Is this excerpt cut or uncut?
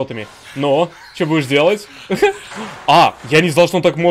cut